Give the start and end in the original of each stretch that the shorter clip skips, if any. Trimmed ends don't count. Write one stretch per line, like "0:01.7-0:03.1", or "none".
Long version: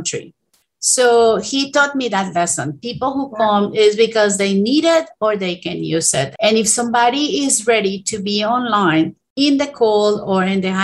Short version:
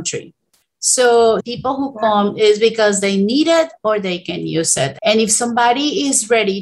0:01.5-0:02.8